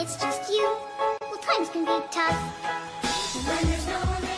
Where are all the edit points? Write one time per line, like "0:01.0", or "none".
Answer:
none